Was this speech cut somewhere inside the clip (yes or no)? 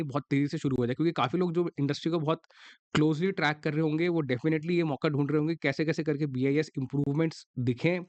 no